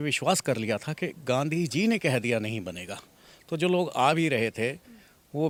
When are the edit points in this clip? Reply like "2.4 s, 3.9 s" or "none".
none